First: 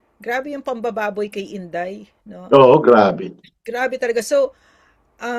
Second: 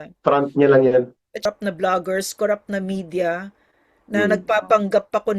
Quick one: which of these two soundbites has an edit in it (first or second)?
second